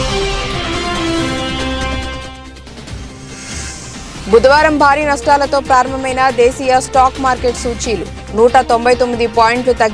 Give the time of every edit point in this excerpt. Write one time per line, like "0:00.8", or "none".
none